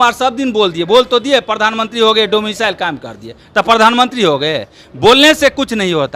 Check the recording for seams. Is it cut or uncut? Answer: uncut